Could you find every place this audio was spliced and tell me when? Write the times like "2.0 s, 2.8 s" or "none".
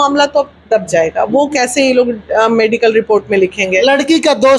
none